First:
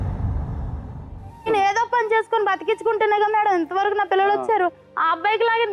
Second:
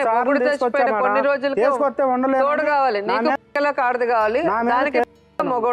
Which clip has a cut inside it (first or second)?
first